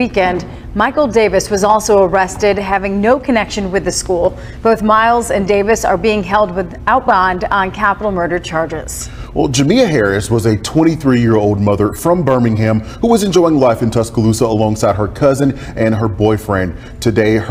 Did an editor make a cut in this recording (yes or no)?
no